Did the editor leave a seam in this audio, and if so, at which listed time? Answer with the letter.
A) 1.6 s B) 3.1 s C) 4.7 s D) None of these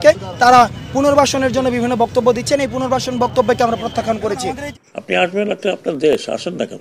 C